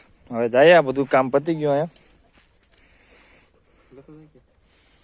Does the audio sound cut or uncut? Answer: uncut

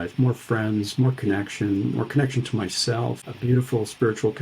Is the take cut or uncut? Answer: cut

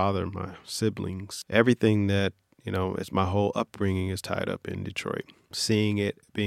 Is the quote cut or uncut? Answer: cut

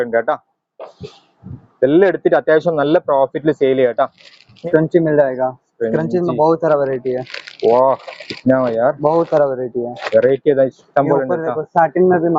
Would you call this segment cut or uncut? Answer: cut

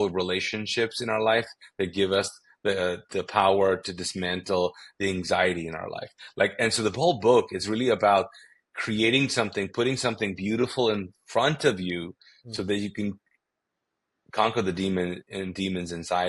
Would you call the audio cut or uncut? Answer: uncut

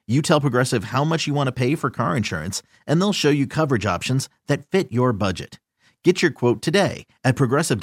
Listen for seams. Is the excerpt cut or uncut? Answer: uncut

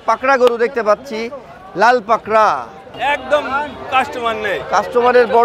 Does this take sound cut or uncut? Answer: cut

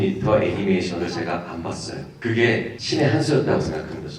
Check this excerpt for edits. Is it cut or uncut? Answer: cut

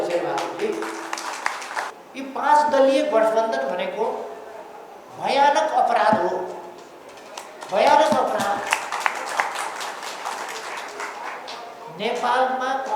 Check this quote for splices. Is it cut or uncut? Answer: cut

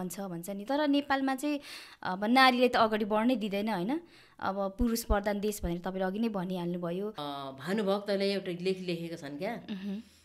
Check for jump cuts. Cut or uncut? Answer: cut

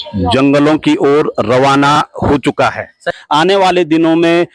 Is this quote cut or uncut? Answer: cut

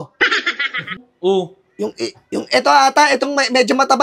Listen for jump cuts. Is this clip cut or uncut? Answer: cut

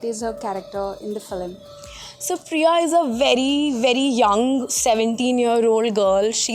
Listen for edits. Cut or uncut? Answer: uncut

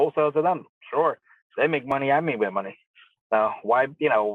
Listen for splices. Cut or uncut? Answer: cut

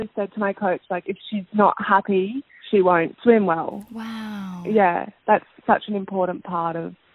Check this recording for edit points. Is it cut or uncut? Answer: uncut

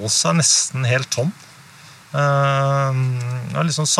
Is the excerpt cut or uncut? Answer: uncut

